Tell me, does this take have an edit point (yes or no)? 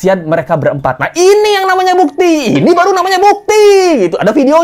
no